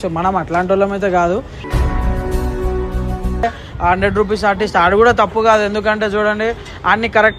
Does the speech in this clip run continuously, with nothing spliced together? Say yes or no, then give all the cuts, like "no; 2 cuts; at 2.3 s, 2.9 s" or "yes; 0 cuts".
no; 1 cut; at 3.4 s